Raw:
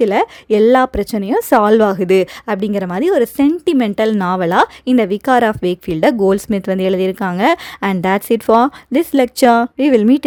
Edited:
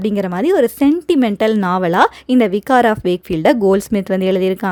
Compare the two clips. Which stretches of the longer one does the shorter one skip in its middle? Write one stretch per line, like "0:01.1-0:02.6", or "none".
none